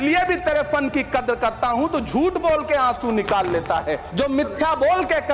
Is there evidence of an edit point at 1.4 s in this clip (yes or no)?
no